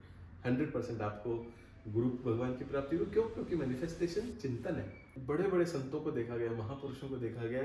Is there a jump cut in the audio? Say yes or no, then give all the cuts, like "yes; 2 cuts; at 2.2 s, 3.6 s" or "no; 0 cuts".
yes; 1 cut; at 5.1 s